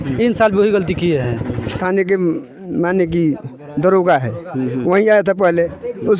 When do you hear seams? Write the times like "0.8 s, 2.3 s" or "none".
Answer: 1.7 s